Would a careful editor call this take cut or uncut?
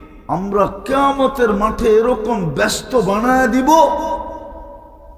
uncut